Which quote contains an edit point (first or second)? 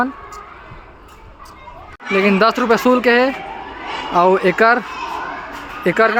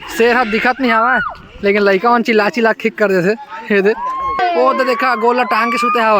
second